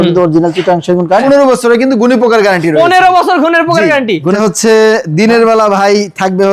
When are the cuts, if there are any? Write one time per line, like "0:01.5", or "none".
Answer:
0:01.2
0:04.3